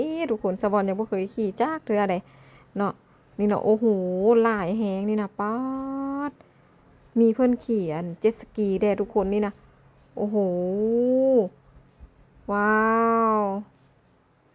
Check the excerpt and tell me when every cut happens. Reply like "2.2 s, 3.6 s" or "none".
none